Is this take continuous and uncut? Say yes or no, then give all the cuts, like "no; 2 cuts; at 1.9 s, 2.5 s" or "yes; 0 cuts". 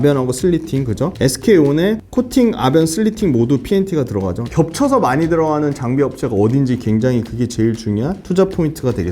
no; 2 cuts; at 4.4 s, 8.2 s